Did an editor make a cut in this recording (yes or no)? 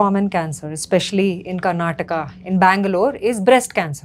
no